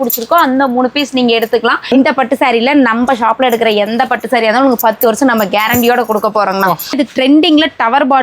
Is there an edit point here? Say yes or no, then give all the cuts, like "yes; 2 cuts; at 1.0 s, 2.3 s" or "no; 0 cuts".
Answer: yes; 2 cuts; at 1.9 s, 6.9 s